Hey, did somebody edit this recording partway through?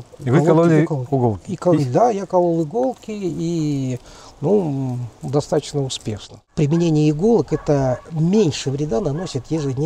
yes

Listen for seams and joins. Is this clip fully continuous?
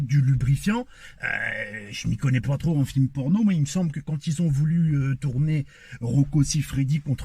yes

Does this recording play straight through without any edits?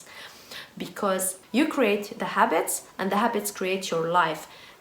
no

